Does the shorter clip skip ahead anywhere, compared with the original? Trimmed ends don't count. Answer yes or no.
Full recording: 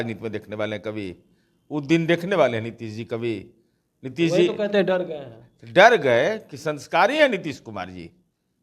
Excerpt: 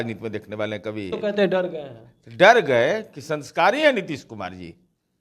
yes